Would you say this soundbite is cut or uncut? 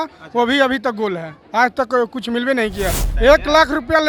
cut